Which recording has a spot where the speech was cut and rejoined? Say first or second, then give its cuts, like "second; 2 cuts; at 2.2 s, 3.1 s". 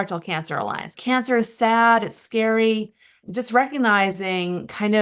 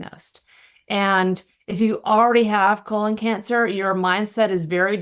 first; 2 cuts; at 0.9 s, 3.2 s